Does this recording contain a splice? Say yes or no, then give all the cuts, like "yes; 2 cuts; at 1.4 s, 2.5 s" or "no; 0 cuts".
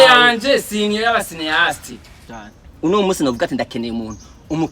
yes; 1 cut; at 2.3 s